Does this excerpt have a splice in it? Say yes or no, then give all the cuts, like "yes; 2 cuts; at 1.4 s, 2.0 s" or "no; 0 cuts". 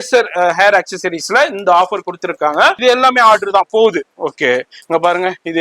yes; 1 cut; at 2.8 s